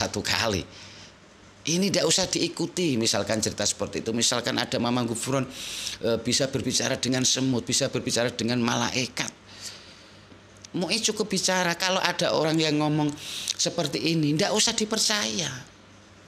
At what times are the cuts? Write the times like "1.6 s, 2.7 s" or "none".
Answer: none

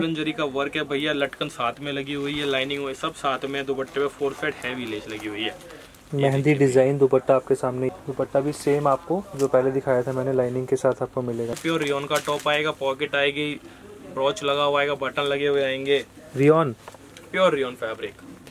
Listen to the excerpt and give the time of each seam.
7.9 s, 11.5 s

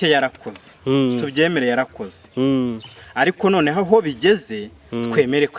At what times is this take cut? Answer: none

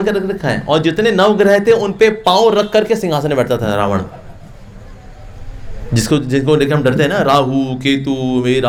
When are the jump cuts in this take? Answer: none

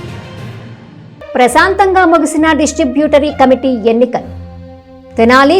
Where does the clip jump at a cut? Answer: 1.0 s

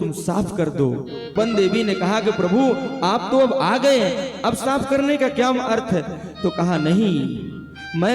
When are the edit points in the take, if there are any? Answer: 1.3 s

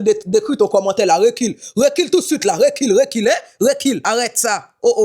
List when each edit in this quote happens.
4.0 s

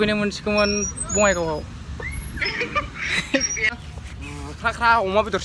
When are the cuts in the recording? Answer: 3.7 s

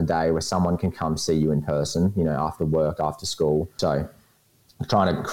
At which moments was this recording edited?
3.7 s

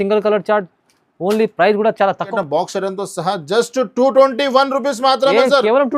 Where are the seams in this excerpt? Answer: 2.3 s

